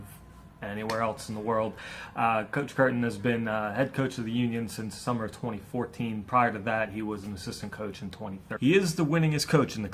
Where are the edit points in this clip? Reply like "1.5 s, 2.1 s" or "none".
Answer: 2.8 s